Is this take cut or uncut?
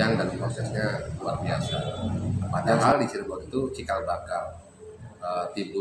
cut